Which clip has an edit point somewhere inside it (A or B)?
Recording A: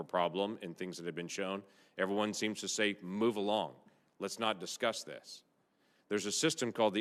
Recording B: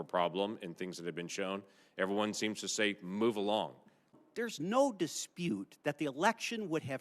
B